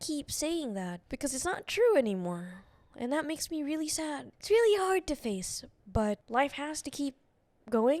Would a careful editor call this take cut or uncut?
cut